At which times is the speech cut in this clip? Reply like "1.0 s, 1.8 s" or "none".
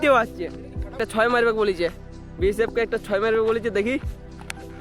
1.0 s